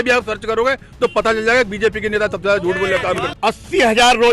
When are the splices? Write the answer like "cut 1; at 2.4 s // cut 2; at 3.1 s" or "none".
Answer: cut 1; at 3.3 s

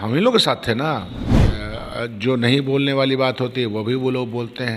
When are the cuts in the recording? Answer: cut 1; at 1.6 s

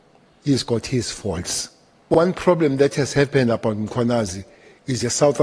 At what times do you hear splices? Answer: cut 1; at 2.1 s

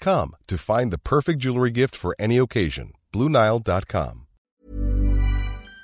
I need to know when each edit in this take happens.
cut 1; at 4.4 s

